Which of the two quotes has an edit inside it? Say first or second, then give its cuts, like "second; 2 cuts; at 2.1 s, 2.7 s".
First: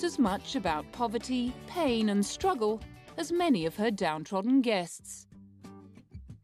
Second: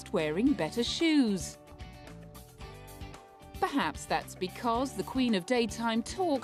first; 1 cut; at 5.5 s